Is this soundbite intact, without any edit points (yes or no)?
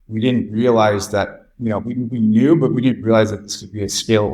yes